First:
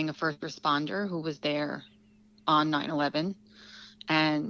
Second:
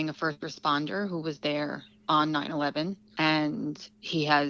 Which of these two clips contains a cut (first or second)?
second